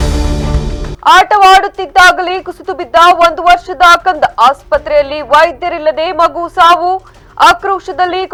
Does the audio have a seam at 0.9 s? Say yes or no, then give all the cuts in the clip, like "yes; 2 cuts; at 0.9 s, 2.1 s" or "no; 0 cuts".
no; 0 cuts